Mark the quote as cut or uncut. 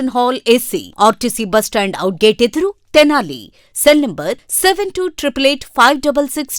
uncut